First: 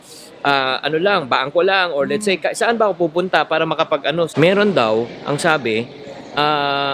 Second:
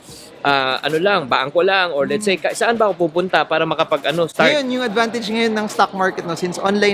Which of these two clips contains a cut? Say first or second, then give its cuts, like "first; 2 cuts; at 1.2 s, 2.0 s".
first; 1 cut; at 4.3 s